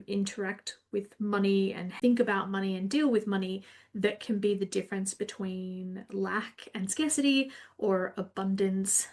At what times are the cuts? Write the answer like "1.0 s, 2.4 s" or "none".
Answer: 1.9 s